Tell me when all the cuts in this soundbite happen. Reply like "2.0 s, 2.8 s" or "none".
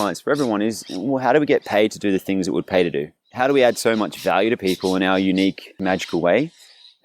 3.2 s, 5.8 s